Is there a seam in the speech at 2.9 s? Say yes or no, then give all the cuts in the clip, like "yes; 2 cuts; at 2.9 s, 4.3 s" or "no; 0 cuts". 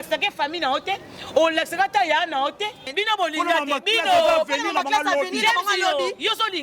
yes; 1 cut; at 2.9 s